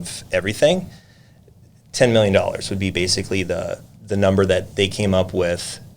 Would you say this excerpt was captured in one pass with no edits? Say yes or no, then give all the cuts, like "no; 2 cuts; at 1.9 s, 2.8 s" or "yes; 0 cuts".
yes; 0 cuts